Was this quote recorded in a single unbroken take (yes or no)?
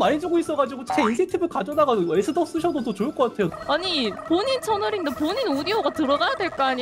no